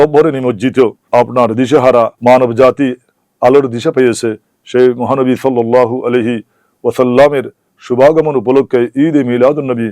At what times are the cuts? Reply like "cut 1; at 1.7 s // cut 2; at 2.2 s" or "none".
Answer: cut 1; at 1.0 s // cut 2; at 2.1 s

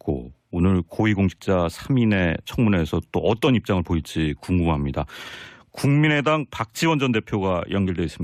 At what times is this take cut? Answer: none

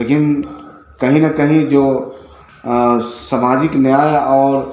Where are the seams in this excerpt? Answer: none

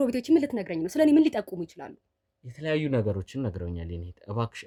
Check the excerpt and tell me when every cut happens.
none

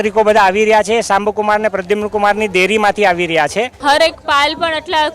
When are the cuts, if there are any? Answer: cut 1; at 3.7 s

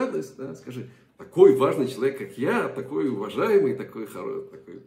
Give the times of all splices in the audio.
none

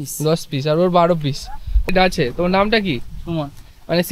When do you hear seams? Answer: cut 1; at 1.9 s

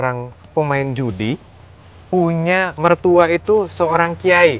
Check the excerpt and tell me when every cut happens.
cut 1; at 2.8 s

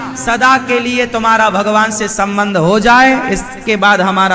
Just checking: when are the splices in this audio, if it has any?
none

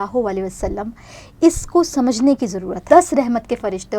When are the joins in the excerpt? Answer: cut 1; at 2.8 s

